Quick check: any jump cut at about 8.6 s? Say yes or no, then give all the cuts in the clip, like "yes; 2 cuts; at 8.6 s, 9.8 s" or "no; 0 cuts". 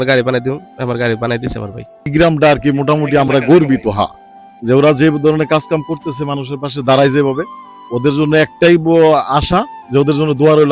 no; 1 cut; at 2.1 s